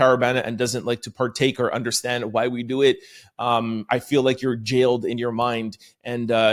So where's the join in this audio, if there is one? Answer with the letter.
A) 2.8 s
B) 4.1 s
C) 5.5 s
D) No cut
D